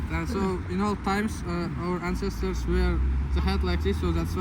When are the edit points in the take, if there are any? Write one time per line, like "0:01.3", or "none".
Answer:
none